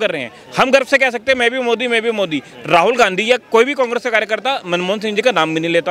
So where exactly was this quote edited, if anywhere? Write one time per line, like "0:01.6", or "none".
none